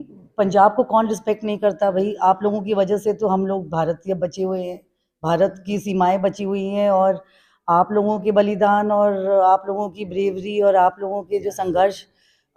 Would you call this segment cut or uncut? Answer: uncut